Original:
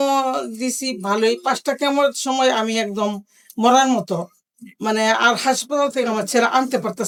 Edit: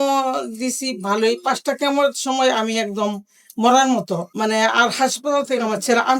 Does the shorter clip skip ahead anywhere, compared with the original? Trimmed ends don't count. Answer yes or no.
yes